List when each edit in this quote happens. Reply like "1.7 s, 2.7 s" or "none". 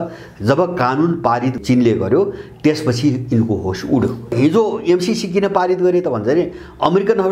4.3 s